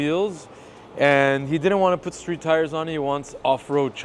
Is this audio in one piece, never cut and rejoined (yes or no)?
yes